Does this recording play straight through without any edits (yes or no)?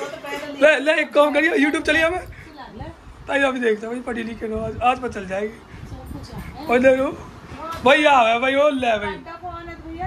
yes